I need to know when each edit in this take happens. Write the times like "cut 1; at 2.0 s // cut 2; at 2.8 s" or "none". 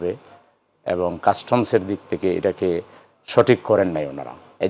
none